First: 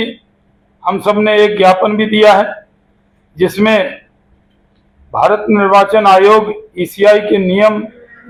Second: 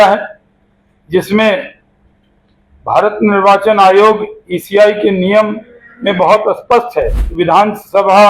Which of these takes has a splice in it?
second; 1 cut; at 7.2 s

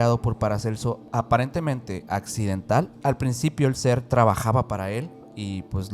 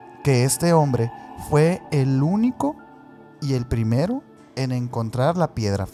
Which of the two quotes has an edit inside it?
first; 2 cuts; at 1.0 s, 3.0 s

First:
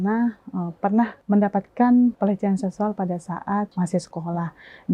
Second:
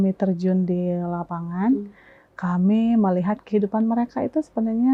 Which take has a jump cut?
first; 3 cuts; at 1.2 s, 2.2 s, 3.7 s

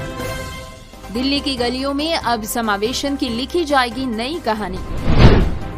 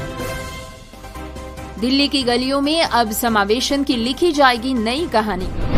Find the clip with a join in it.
first; 1 cut; at 1.0 s

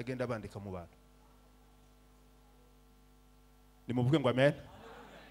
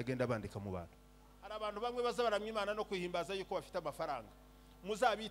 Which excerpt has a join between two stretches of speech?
second; 1 cut; at 1.6 s

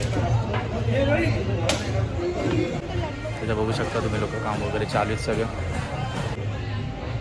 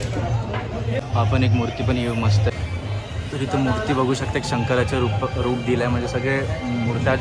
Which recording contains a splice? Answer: second; 2 cuts; at 1.0 s, 2.5 s

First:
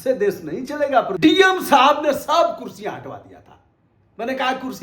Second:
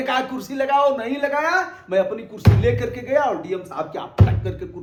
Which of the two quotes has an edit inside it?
first; 1 cut; at 1.2 s

